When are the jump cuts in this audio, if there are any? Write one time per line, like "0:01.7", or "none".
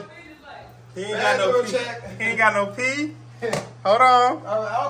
none